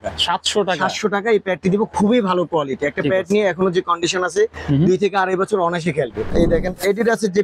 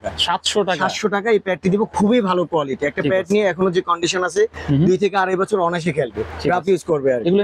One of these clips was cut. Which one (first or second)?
first